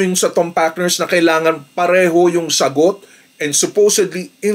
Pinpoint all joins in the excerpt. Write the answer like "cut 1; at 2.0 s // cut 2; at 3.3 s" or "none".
none